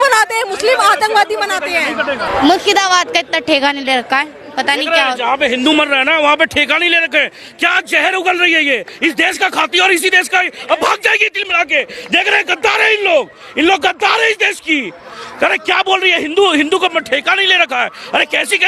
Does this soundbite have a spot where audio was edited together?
yes; 1 cut; at 2.3 s

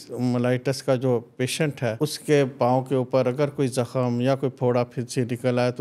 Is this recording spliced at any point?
yes; 1 cut; at 2.0 s

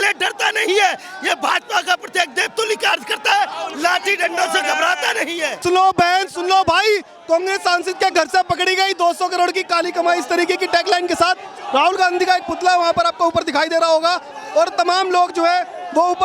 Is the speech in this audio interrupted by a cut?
no; 0 cuts

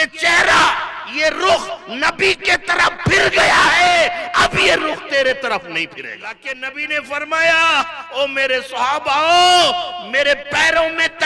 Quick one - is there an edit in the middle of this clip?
yes; 1 cut; at 6.5 s

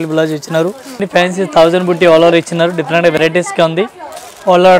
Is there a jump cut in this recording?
yes; 1 cut; at 1.0 s

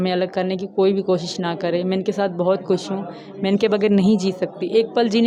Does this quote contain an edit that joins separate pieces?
no; 0 cuts

